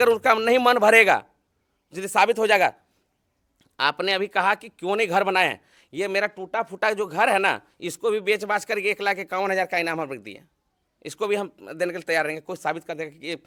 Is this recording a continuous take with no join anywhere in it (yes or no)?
yes